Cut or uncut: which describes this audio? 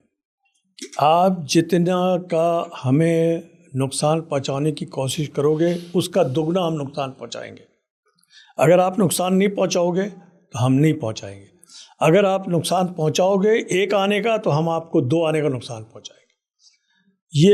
uncut